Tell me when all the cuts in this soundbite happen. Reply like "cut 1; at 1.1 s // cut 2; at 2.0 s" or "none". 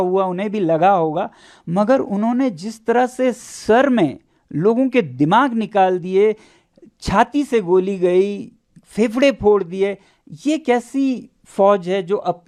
none